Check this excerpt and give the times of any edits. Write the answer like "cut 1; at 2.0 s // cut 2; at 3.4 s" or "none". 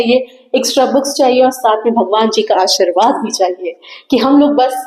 none